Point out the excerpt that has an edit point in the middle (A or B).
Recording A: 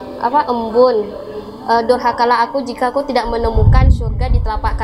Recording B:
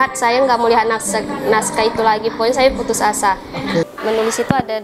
B